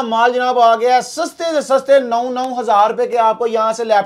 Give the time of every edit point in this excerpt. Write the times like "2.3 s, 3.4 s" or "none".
none